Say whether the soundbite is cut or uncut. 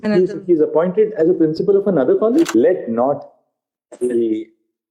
cut